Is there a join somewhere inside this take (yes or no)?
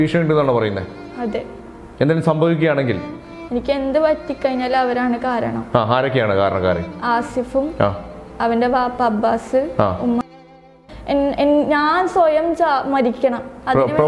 yes